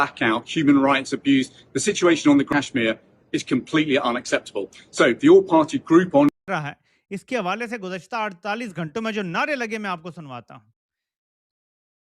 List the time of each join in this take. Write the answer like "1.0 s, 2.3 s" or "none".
2.5 s, 6.3 s